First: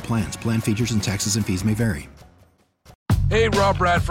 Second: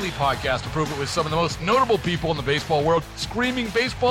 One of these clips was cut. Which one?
first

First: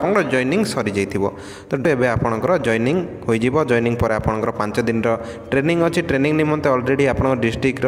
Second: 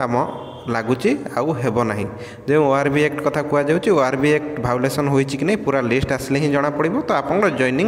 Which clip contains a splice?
first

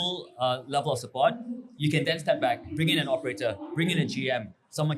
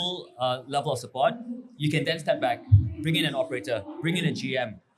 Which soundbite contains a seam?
first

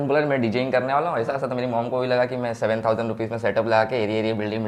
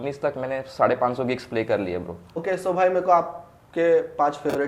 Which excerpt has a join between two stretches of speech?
second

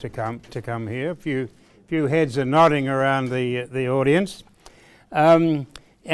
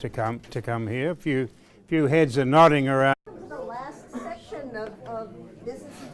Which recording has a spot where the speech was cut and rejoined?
first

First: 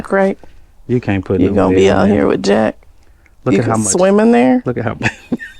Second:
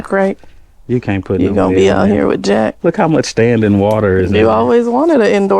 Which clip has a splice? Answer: second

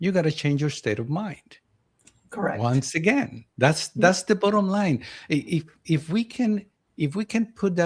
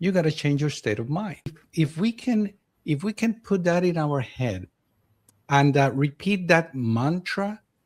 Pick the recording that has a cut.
second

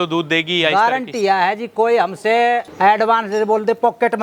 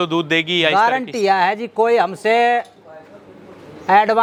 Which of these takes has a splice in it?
first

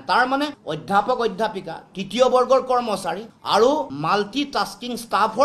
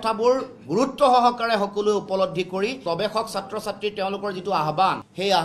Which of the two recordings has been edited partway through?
second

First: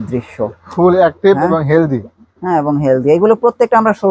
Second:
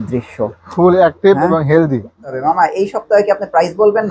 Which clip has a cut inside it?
second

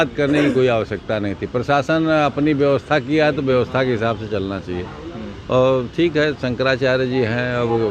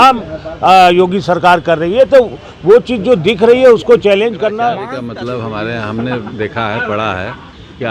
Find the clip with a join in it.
second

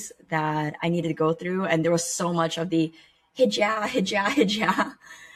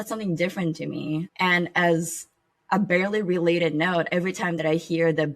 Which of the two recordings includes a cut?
second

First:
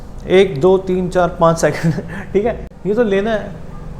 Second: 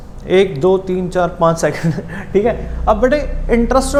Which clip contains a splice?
first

